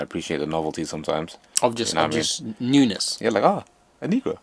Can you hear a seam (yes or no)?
no